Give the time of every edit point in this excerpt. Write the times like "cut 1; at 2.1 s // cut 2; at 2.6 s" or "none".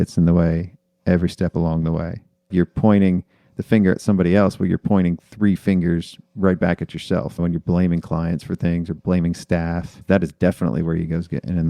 cut 1; at 2.5 s // cut 2; at 7.3 s